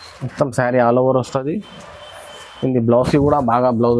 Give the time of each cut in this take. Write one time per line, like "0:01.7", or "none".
none